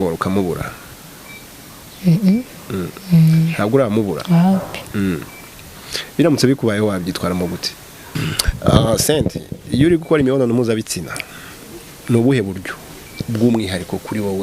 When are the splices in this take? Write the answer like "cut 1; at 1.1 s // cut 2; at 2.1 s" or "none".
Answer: cut 1; at 8.1 s